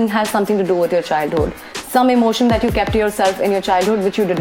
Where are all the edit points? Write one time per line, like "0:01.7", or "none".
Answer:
none